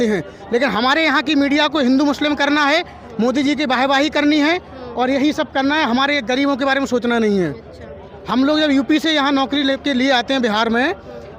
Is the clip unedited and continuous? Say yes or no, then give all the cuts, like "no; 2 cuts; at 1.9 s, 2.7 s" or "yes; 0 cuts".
yes; 0 cuts